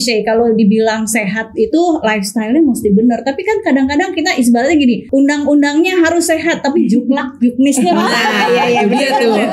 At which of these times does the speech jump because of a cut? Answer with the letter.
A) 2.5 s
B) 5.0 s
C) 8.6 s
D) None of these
B